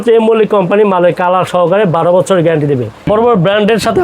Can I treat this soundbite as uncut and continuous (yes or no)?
no